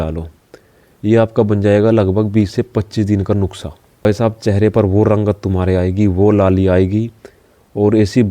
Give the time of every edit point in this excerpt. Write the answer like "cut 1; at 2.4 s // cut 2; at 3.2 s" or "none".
cut 1; at 4.0 s